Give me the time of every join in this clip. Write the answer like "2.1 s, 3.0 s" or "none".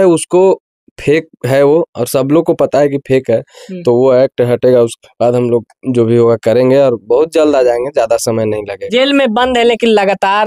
8.8 s